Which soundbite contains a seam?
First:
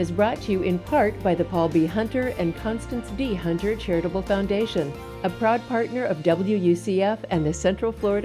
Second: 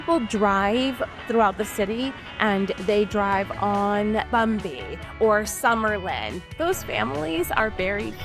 second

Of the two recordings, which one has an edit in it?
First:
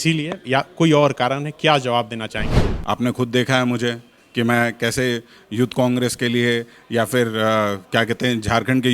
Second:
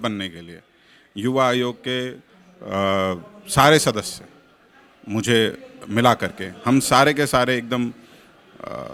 first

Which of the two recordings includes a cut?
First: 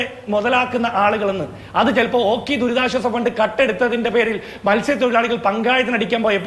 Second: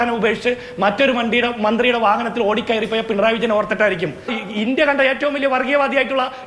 second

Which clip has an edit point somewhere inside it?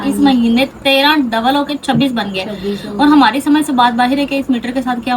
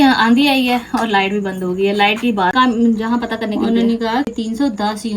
second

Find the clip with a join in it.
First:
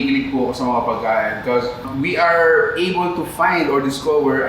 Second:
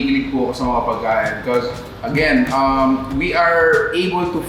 first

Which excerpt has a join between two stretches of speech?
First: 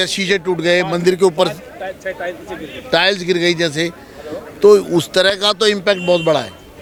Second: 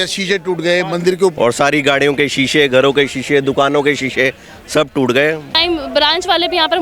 second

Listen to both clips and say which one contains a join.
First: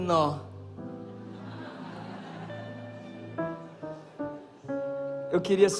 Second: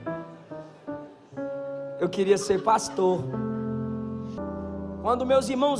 second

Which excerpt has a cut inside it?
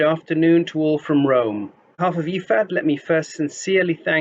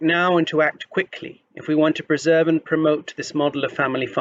first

